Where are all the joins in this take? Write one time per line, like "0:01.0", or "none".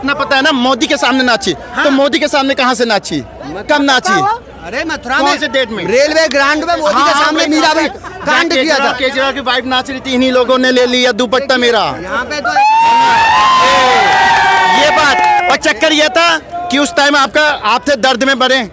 none